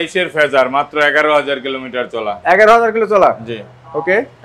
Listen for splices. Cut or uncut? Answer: uncut